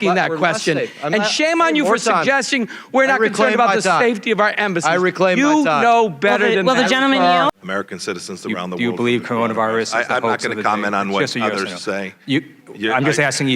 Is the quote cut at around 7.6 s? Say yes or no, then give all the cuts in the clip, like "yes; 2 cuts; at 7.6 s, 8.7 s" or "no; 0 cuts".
yes; 1 cut; at 7.6 s